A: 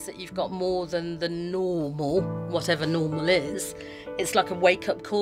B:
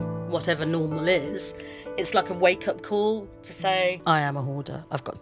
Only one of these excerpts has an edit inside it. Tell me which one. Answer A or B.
B